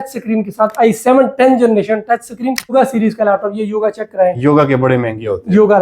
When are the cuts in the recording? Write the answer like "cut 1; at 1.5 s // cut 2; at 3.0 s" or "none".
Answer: cut 1; at 2.7 s